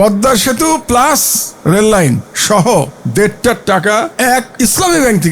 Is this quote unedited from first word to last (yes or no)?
no